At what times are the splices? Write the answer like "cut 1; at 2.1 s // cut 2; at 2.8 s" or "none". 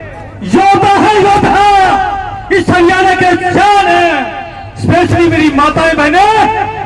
none